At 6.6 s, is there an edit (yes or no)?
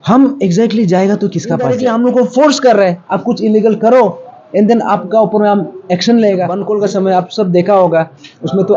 yes